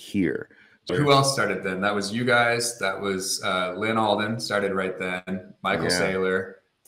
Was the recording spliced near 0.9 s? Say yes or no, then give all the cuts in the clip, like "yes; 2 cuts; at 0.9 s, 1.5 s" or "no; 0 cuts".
yes; 1 cut; at 0.9 s